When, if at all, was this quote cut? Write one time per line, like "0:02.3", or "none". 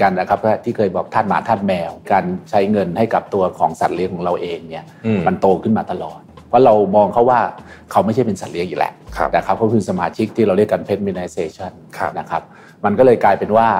0:02.1
0:06.3
0:10.3